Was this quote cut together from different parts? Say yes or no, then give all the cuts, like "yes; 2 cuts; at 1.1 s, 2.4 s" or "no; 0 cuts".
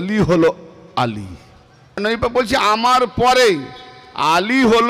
yes; 1 cut; at 2.0 s